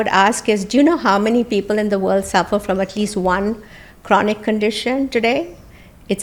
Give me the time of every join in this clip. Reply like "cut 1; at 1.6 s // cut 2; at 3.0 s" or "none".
none